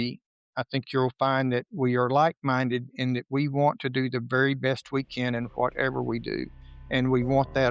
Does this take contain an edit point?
no; 0 cuts

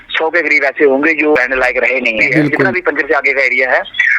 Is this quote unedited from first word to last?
no; 2 cuts; at 1.4 s, 2.7 s

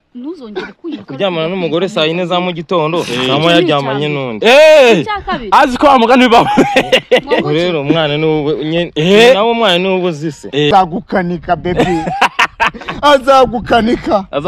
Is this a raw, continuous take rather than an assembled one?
no; 1 cut; at 10.7 s

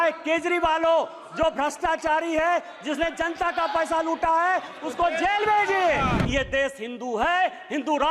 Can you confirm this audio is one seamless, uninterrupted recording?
no; 1 cut; at 6.2 s

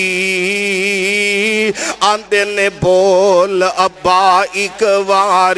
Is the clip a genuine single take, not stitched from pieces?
yes; 0 cuts

